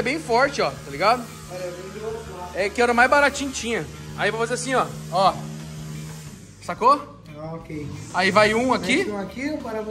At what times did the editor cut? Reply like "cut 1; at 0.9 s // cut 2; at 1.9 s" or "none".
none